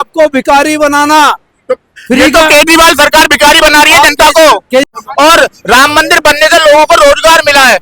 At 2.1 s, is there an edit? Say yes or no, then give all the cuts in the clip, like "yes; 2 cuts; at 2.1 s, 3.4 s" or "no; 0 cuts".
no; 1 cut; at 4.9 s